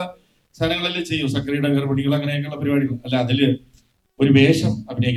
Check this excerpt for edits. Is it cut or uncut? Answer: uncut